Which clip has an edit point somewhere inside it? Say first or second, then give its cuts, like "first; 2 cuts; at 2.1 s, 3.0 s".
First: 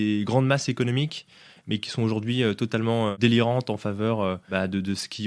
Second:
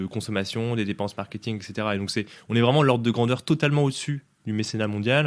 first; 2 cuts; at 3.1 s, 4.4 s